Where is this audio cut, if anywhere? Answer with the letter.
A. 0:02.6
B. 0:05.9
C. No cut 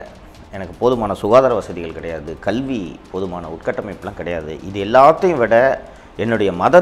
C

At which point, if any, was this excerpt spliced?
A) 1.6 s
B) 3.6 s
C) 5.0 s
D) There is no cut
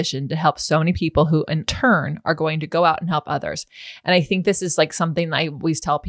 A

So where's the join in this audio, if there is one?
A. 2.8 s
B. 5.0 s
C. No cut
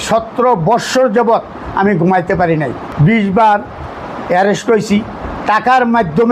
A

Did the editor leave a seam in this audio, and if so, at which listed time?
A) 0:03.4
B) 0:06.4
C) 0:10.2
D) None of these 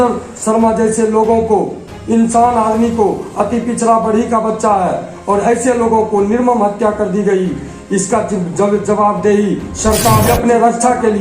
C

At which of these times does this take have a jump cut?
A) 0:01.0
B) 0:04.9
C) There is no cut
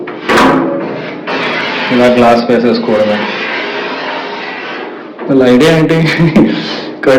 C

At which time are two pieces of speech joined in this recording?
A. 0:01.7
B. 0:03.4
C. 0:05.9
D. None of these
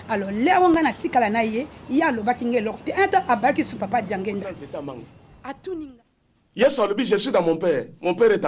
C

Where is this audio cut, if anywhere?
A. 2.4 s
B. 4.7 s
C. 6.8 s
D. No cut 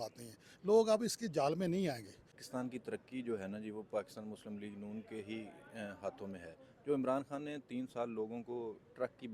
A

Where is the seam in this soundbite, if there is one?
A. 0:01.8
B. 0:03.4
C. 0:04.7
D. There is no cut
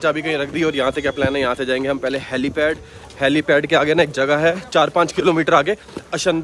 D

